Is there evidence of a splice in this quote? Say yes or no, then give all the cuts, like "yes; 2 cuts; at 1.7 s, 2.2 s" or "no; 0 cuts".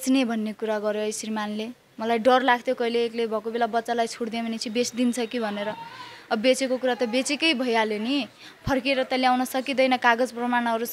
no; 0 cuts